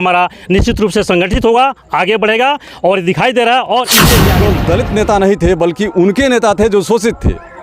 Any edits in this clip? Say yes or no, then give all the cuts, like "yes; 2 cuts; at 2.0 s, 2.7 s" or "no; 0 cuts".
yes; 1 cut; at 4.2 s